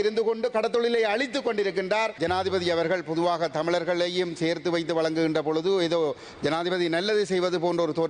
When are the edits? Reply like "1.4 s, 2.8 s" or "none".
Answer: 2.2 s